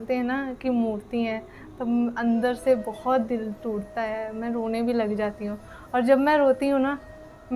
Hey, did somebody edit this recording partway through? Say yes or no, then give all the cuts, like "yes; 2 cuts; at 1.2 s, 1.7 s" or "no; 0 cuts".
no; 0 cuts